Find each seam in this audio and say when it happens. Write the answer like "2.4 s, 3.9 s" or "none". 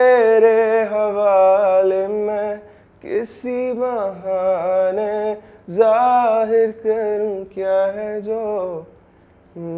none